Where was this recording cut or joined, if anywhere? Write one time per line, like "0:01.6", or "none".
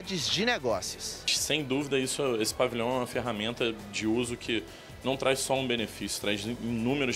0:01.4